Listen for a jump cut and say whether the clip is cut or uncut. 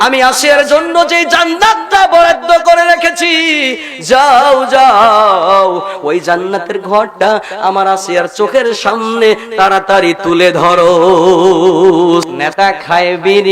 cut